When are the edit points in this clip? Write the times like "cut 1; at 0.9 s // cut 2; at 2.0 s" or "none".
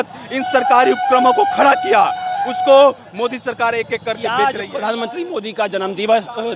cut 1; at 4.2 s

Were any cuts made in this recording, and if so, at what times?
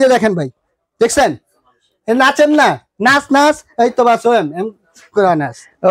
none

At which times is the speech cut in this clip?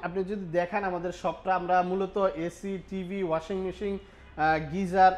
none

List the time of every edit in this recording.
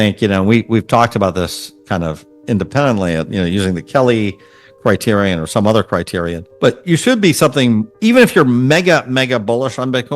cut 1; at 6.4 s // cut 2; at 7.9 s

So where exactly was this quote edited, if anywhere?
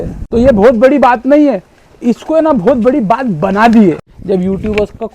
cut 1; at 4.0 s

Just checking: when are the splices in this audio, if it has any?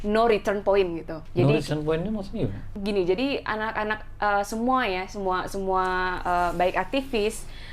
cut 1; at 1.1 s // cut 2; at 2.6 s

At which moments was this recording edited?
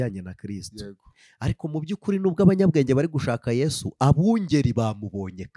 none

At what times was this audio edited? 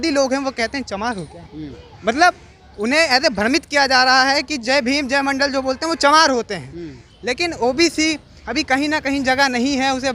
none

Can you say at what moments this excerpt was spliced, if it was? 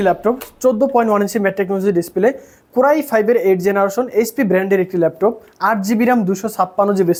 none

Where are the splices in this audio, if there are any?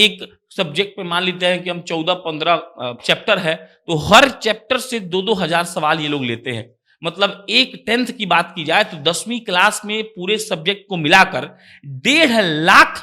none

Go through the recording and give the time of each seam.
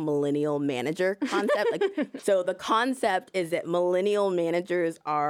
cut 1; at 2.1 s

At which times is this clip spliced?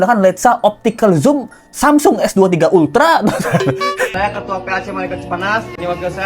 cut 1; at 4.1 s

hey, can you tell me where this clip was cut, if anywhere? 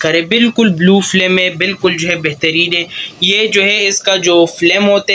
none

